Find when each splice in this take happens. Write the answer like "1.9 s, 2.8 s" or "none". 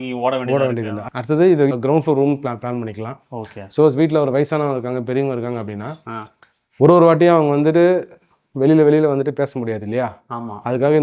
1.0 s, 1.7 s